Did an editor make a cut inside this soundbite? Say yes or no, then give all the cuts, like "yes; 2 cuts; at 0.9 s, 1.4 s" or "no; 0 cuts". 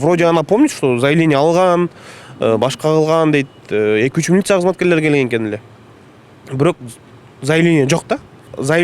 no; 0 cuts